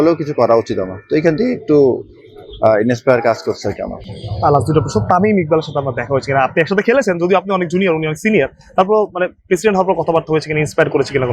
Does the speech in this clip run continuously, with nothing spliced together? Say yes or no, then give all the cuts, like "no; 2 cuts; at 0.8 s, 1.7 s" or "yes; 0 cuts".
yes; 0 cuts